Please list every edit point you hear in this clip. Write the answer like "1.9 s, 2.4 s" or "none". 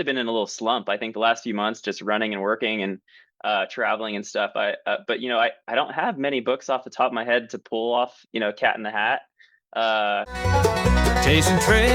10.3 s